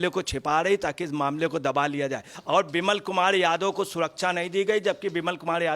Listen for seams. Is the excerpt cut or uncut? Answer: cut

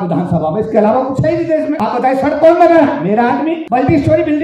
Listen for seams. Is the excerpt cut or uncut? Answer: uncut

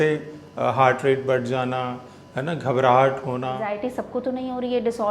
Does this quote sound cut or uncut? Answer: cut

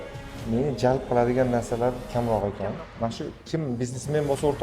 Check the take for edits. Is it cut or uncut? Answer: cut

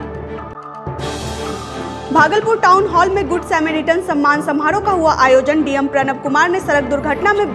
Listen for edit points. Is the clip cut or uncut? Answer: cut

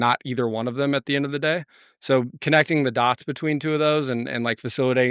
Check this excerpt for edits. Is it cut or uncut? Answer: uncut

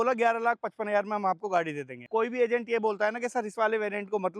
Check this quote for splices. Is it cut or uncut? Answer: cut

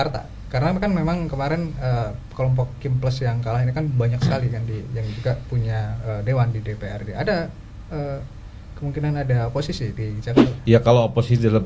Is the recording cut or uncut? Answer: cut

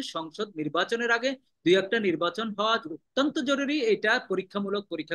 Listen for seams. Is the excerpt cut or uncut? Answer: uncut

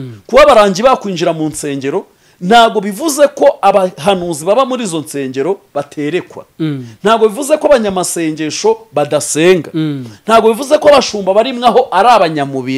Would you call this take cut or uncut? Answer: uncut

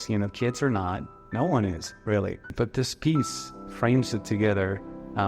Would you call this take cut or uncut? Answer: cut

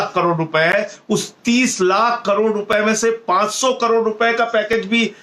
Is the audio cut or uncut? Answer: uncut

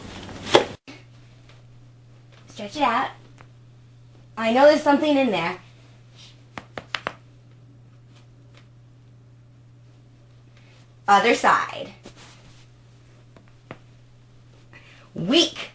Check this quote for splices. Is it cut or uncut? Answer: uncut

